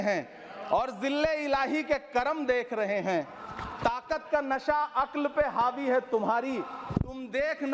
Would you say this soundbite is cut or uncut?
uncut